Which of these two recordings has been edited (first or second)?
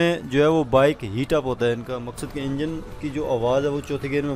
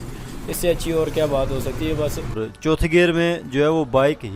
second